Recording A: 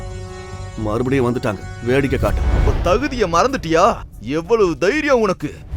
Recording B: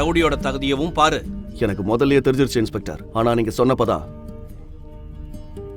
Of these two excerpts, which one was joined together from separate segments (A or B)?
A